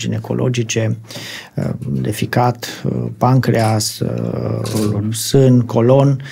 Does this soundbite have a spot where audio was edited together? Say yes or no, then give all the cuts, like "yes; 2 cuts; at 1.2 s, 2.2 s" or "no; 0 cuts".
no; 0 cuts